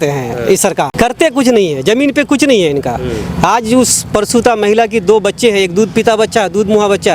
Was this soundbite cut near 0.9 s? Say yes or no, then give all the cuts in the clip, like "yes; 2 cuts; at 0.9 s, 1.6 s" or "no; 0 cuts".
yes; 1 cut; at 0.9 s